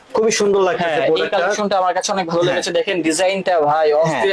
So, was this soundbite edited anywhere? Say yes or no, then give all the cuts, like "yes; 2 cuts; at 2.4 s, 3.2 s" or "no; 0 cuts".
no; 0 cuts